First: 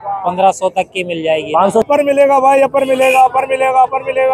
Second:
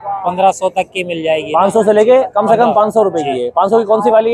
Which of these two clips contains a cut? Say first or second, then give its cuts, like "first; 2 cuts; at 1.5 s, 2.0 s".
first; 1 cut; at 1.8 s